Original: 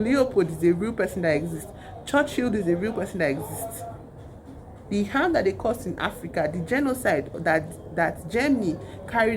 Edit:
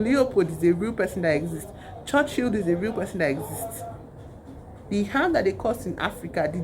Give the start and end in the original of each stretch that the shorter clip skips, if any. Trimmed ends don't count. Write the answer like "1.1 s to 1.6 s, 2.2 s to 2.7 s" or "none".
none